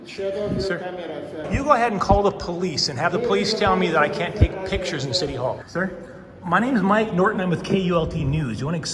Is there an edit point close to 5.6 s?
yes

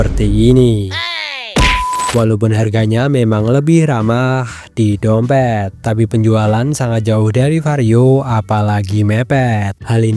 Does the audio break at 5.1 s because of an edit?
no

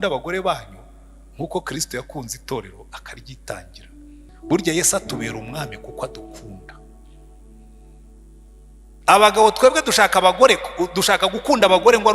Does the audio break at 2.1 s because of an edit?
no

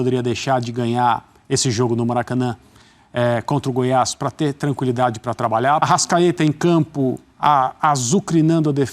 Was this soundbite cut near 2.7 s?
no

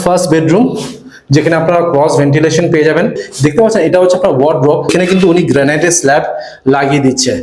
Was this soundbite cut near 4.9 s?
yes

